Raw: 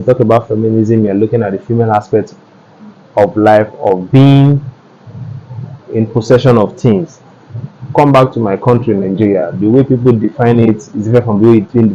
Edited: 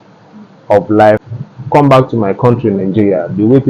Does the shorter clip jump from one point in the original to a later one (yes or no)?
yes